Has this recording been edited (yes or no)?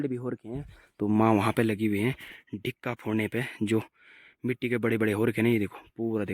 no